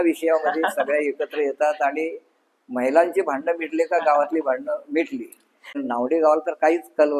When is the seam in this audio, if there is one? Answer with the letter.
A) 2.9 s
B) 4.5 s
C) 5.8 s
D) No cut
C